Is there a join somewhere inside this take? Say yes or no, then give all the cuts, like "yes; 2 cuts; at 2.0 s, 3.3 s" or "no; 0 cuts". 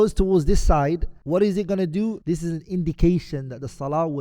yes; 2 cuts; at 1.1 s, 2.2 s